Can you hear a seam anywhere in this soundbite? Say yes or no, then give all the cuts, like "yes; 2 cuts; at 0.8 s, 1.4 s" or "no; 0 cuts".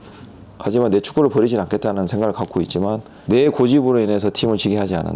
yes; 1 cut; at 3.1 s